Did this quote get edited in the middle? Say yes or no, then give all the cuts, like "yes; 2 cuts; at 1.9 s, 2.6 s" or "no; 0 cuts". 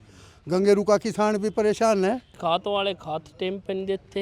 yes; 1 cut; at 2.3 s